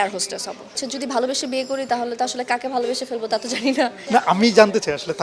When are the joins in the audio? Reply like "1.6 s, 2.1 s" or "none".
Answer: 0.8 s, 4.0 s